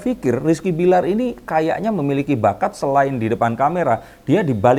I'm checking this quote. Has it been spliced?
no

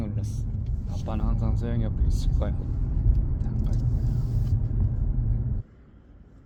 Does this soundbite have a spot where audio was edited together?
no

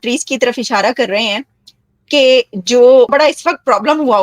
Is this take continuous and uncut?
no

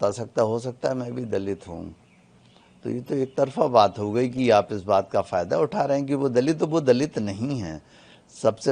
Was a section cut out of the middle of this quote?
no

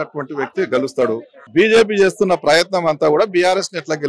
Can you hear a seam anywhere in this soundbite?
yes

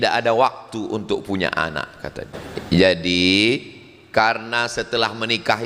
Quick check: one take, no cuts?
no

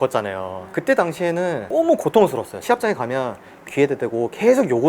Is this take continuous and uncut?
no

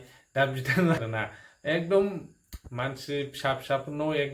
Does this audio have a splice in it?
yes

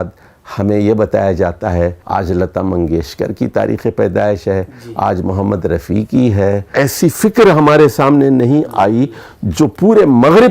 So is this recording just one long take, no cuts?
no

